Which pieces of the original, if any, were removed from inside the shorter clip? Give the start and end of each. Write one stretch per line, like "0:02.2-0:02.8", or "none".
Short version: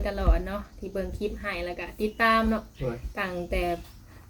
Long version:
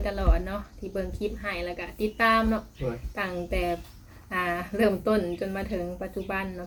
none